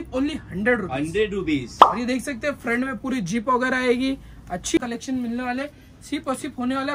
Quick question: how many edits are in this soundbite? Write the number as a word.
one